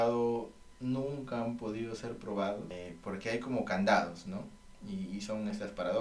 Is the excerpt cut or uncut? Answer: cut